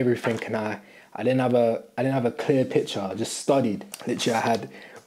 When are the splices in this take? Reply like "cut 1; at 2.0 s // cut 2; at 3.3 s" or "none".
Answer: none